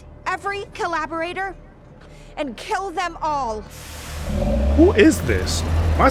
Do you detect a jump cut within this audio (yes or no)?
no